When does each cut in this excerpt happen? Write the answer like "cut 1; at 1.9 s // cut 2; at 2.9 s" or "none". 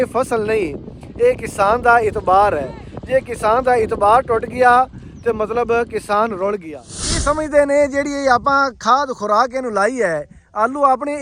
cut 1; at 6.9 s